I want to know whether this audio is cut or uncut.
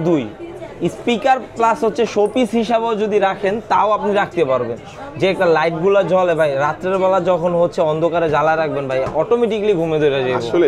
uncut